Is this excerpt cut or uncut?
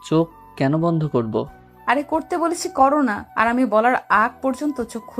uncut